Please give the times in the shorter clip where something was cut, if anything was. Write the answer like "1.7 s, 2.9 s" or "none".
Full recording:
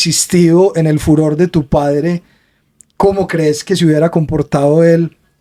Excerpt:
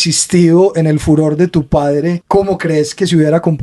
2.2 s